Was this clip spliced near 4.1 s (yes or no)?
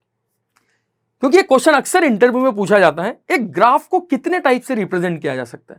no